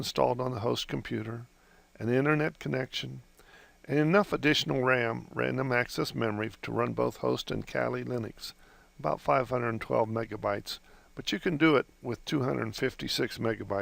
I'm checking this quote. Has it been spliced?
yes; 1 cut; at 10.9 s

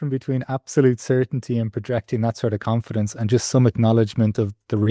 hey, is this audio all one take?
yes; 0 cuts

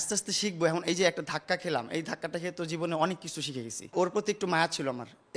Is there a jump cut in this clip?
yes; 1 cut; at 3.9 s

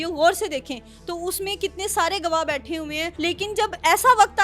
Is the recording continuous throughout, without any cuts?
no; 1 cut; at 3.1 s

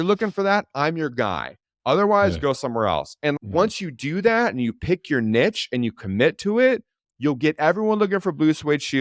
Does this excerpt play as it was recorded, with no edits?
yes; 0 cuts

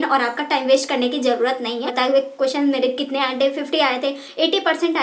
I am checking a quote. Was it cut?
yes; 1 cut; at 1.9 s

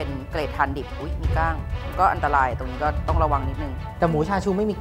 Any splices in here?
yes; 1 cut; at 3.8 s

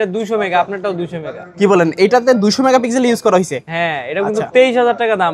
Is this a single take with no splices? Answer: yes; 0 cuts

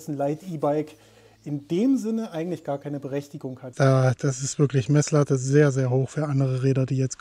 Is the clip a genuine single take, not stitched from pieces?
no; 1 cut; at 3.6 s

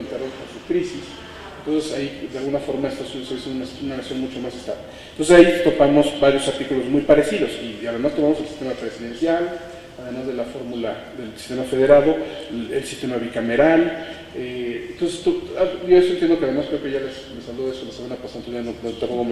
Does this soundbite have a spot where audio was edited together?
no; 0 cuts

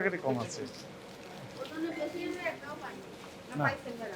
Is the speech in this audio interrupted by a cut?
no; 0 cuts

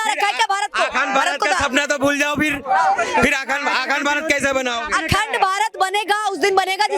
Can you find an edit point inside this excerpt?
no; 0 cuts

